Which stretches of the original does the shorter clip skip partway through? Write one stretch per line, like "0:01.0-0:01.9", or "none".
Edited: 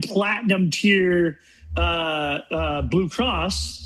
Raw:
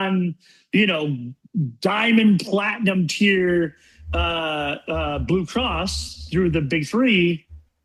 none